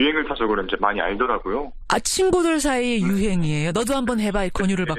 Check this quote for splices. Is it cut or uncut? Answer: cut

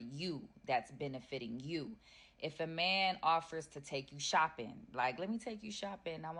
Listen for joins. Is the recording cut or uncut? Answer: uncut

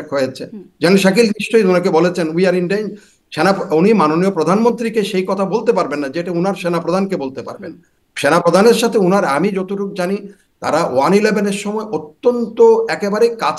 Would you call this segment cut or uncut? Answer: uncut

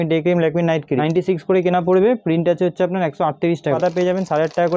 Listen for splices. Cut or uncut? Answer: cut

